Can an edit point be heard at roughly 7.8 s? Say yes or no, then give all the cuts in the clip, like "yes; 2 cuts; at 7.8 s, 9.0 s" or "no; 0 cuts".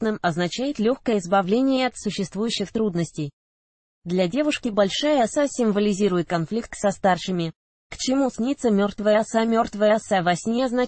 yes; 1 cut; at 7.8 s